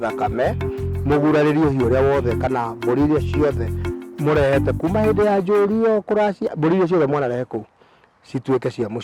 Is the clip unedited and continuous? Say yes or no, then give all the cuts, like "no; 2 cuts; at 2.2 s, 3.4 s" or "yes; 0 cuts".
yes; 0 cuts